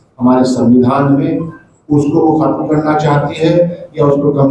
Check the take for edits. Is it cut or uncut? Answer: uncut